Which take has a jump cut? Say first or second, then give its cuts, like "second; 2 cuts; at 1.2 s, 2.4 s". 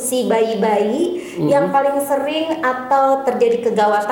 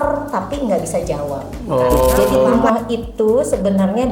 second; 1 cut; at 2.5 s